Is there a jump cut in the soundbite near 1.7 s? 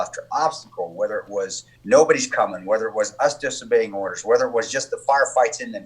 yes; 1 cut; at 1.7 s

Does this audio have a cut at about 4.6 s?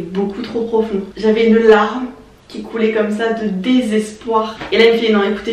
yes; 2 cuts; at 1.1 s, 4.6 s

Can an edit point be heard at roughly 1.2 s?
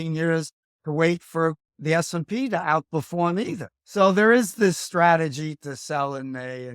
no; 1 cut; at 3.7 s

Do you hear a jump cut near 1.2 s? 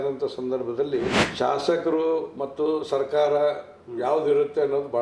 yes; 1 cut; at 1.2 s

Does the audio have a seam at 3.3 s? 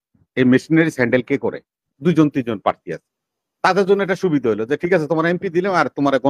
no; 1 cut; at 1.8 s

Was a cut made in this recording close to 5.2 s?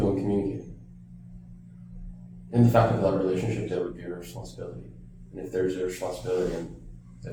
no; 0 cuts

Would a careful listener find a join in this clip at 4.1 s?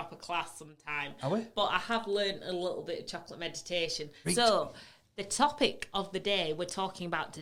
yes; 1 cut; at 4.1 s

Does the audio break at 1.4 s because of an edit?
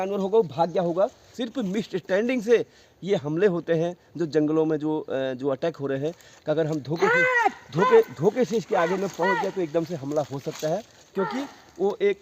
yes; 1 cut; at 1.4 s

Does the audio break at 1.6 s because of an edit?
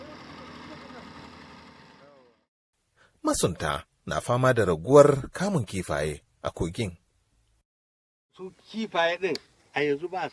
no; 0 cuts

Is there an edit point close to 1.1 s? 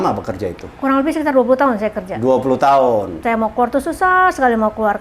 no; 1 cut; at 3.1 s

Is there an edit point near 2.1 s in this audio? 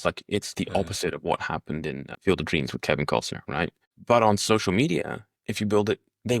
yes; 2 cuts; at 2.1 s, 3.9 s

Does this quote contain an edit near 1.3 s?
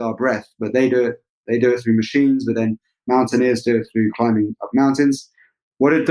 yes; 1 cut; at 1.3 s

